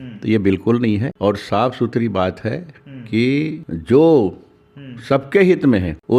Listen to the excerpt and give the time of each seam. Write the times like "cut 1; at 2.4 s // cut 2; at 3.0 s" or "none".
none